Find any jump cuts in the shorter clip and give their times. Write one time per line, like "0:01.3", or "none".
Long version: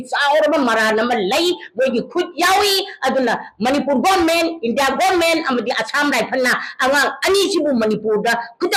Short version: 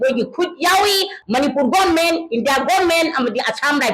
0:01.2